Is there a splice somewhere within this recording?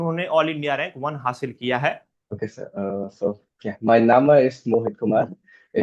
yes; 1 cut; at 2.1 s

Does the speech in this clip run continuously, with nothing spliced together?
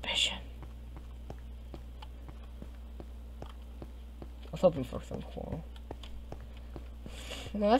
no; 1 cut; at 6.9 s

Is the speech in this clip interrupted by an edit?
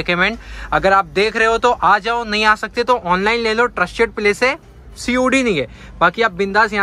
no; 0 cuts

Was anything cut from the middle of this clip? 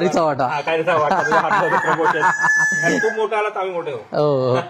no; 0 cuts

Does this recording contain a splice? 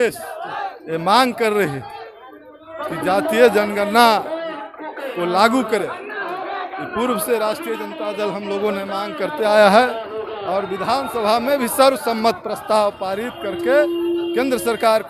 no; 0 cuts

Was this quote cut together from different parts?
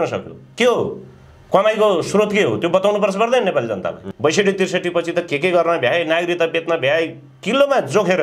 yes; 1 cut; at 4.0 s

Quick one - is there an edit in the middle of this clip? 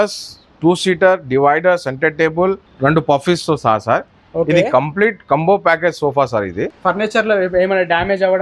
yes; 2 cuts; at 2.7 s, 6.8 s

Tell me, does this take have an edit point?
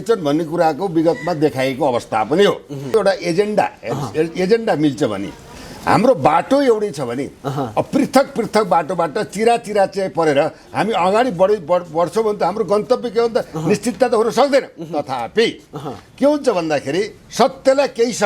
yes; 1 cut; at 2.9 s

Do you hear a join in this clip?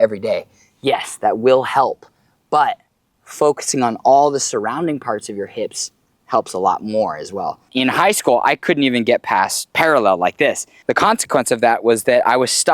yes; 3 cuts; at 7.7 s, 9.6 s, 10.7 s

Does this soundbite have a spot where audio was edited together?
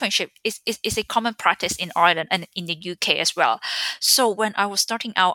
no; 0 cuts

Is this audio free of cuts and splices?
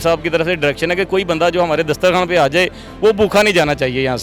yes; 0 cuts

